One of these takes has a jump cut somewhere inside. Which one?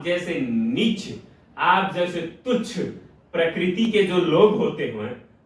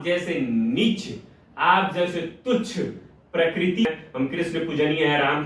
second; 1 cut; at 3.9 s

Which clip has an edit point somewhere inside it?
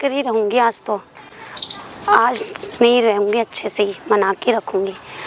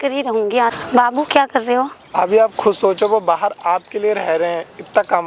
second; 2 cuts; at 0.8 s, 2.0 s

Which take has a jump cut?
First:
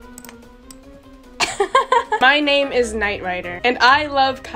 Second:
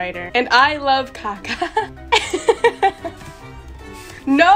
first; 1 cut; at 2.2 s

